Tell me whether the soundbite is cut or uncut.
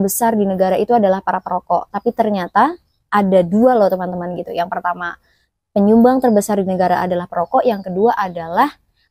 uncut